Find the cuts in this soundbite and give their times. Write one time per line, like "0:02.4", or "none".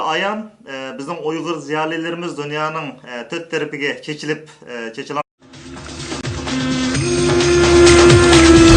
none